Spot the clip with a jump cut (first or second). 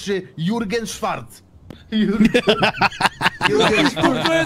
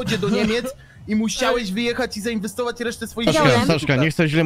second